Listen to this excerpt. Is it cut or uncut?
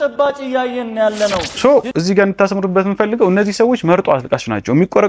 cut